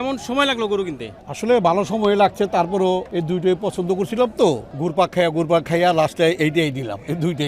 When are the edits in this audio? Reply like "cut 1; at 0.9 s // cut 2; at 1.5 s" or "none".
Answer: cut 1; at 3.1 s // cut 2; at 4.7 s